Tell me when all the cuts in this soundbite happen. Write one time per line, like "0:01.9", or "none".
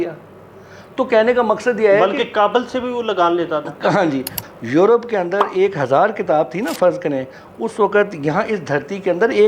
0:04.4